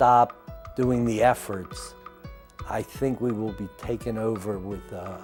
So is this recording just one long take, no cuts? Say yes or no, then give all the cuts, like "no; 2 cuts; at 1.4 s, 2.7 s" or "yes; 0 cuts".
yes; 0 cuts